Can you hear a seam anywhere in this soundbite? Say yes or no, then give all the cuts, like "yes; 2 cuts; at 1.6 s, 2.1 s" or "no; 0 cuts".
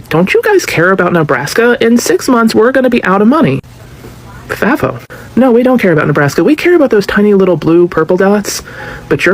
no; 0 cuts